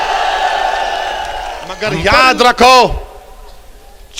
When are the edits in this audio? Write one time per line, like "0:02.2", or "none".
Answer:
0:01.9